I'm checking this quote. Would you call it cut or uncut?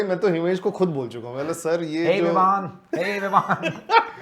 uncut